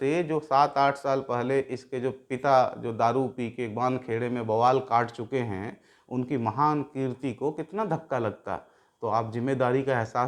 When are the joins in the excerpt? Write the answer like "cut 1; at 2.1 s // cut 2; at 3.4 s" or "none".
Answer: none